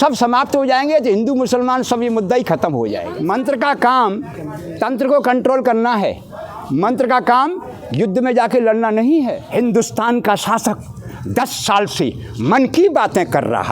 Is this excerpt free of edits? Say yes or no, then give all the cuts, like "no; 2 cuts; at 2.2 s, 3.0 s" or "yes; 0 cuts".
no; 2 cuts; at 3.1 s, 9.4 s